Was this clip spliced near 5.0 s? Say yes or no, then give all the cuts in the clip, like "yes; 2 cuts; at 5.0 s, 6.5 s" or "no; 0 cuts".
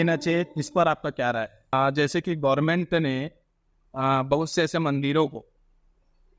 no; 1 cut; at 1.7 s